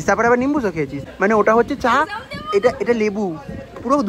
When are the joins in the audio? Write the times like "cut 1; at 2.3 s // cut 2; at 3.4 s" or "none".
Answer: cut 1; at 1.0 s